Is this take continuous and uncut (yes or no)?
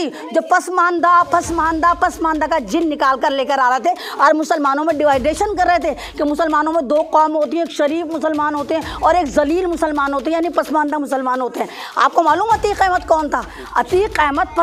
yes